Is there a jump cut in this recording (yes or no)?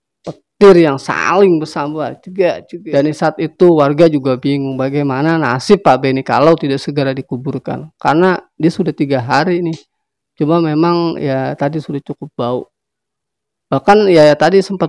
yes